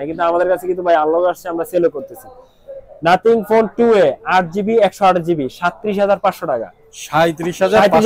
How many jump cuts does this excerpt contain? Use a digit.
0